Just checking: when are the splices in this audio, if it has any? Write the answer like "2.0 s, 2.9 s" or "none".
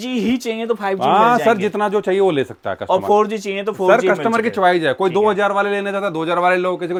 none